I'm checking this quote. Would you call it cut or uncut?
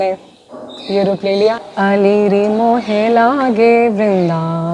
cut